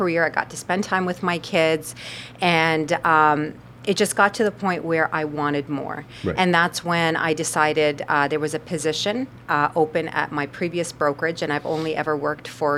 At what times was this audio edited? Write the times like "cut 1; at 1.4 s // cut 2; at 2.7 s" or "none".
none